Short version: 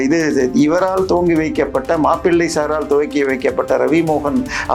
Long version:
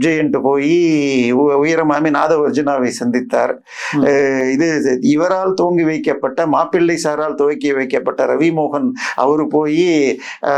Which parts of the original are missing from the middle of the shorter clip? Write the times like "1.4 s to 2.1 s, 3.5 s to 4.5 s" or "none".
none